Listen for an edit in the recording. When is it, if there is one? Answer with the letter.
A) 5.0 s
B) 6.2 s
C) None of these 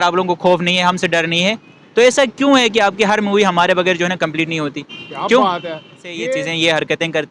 B